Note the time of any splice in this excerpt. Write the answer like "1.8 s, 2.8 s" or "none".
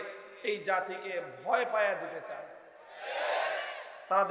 none

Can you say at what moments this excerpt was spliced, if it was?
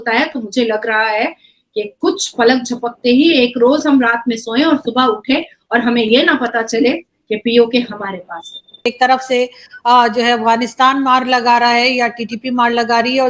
8.9 s

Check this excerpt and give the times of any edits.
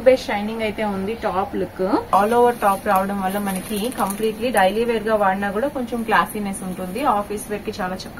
2.1 s

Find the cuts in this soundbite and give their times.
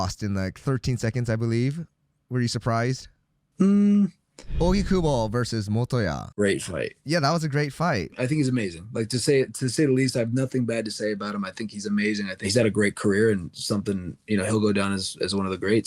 4.4 s, 8.1 s, 12.5 s

